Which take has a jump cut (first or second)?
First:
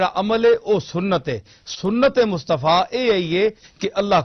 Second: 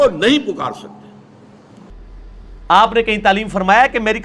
second